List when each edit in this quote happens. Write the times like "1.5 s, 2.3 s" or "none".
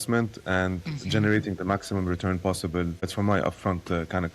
3.1 s